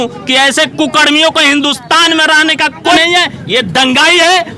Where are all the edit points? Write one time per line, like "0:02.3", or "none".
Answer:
0:03.0